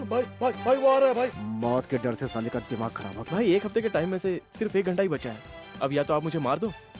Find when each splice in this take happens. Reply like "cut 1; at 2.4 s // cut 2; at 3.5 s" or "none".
cut 1; at 1.4 s // cut 2; at 3.1 s

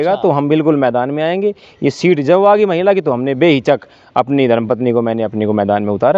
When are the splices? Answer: none

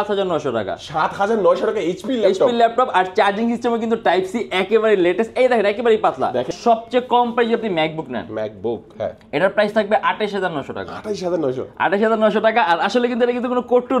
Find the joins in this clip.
cut 1; at 6.5 s

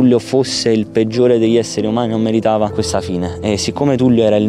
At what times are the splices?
cut 1; at 2.7 s

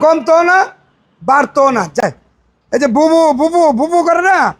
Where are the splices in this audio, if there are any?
cut 1; at 2.0 s

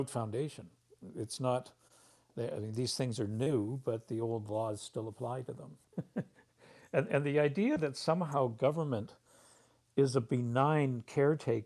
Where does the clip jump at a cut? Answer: cut 1; at 0.9 s // cut 2; at 5.7 s

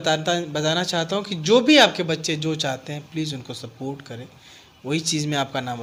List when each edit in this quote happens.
none

